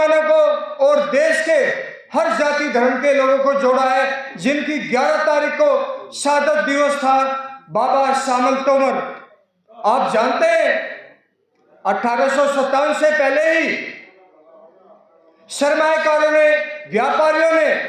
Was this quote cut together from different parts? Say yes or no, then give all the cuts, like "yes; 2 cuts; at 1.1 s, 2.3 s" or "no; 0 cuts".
no; 0 cuts